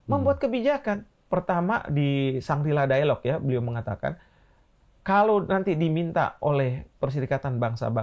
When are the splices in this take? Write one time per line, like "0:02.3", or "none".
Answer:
0:01.1